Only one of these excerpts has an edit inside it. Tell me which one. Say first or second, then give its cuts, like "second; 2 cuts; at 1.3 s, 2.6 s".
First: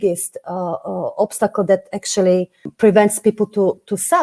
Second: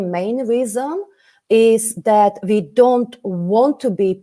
first; 1 cut; at 2.6 s